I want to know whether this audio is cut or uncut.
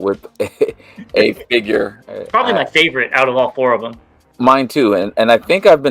cut